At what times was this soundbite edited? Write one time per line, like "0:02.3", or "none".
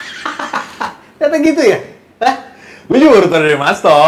none